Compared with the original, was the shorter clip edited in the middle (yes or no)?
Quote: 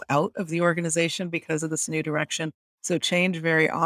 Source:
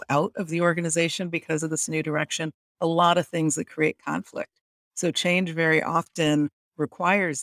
yes